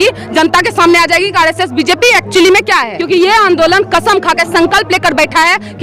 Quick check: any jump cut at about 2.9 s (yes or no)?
yes